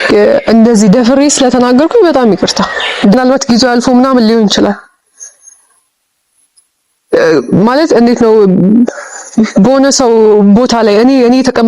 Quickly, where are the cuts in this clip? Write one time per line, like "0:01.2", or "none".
0:03.1